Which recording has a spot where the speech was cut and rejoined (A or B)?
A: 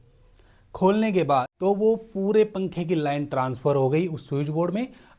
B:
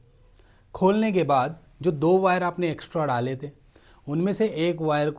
A